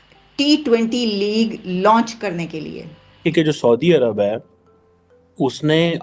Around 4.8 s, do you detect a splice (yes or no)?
no